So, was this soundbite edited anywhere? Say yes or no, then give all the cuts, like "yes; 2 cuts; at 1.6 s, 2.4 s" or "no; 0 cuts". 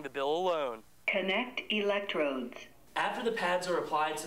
yes; 1 cut; at 0.9 s